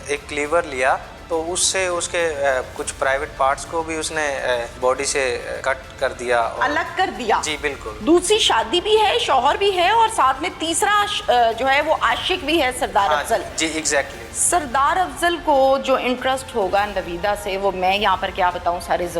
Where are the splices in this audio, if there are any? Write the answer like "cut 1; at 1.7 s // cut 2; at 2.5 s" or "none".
cut 1; at 1.1 s // cut 2; at 4.7 s // cut 3; at 5.6 s // cut 4; at 7.9 s